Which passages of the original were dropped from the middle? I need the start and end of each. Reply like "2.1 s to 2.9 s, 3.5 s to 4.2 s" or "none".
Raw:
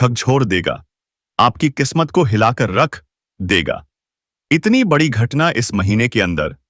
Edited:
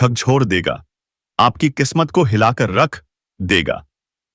none